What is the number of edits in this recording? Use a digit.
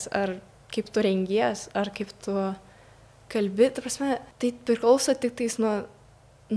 1